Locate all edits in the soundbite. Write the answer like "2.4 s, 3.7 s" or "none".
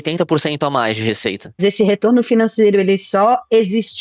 1.6 s